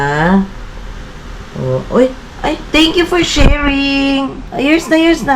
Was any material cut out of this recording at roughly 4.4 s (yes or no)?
yes